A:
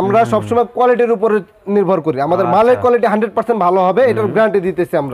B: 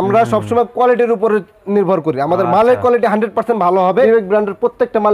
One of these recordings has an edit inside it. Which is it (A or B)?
B